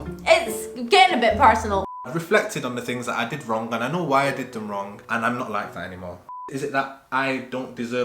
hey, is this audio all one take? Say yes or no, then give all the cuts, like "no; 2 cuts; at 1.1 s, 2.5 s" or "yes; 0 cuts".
no; 2 cuts; at 1.9 s, 6.2 s